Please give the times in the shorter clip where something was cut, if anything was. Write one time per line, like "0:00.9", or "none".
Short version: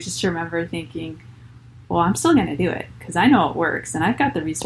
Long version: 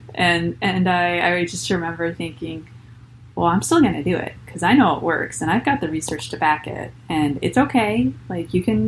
none